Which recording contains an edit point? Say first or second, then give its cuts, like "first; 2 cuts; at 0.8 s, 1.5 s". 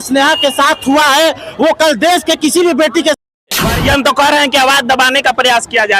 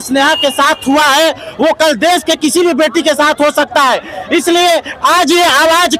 first; 1 cut; at 3.3 s